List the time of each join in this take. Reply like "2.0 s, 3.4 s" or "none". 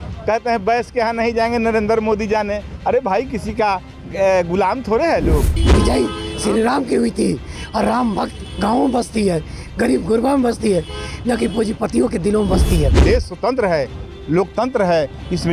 5.6 s, 13.0 s